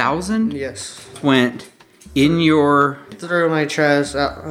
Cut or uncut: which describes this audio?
cut